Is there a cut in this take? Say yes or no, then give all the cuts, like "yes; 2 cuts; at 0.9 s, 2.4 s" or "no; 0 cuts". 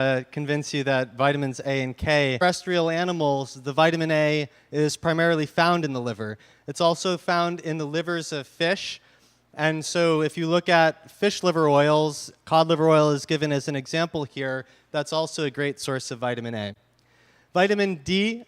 no; 0 cuts